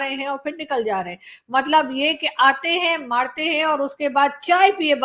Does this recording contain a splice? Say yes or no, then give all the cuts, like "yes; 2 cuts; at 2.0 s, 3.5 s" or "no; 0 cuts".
no; 0 cuts